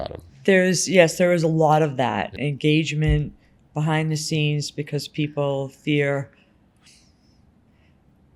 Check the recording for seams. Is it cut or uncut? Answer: cut